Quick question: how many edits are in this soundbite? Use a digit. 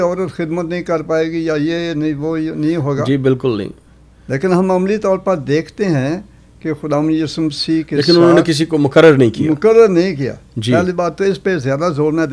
0